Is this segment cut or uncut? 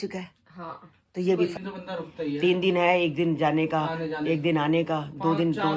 cut